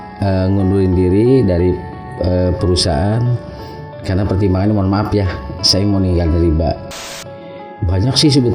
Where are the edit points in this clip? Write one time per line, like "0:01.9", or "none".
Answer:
0:07.1

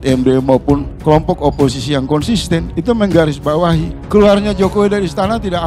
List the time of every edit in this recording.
0:00.9

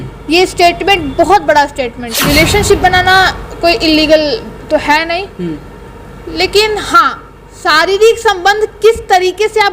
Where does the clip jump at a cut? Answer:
0:02.1

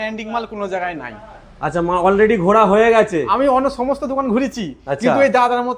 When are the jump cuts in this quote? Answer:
none

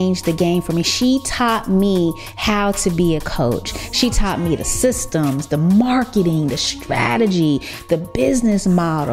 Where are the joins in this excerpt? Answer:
none

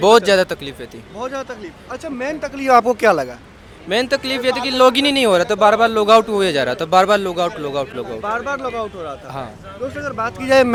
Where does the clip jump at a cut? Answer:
none

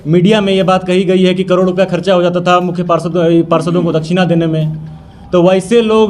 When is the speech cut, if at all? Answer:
none

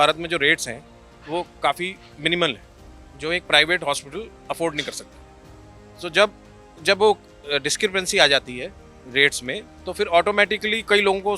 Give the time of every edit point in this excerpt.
none

